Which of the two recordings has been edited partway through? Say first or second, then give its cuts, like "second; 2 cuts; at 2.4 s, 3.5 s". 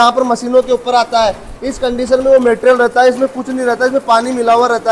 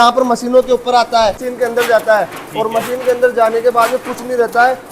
second; 1 cut; at 1.5 s